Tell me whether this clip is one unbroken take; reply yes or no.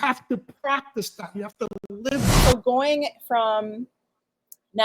no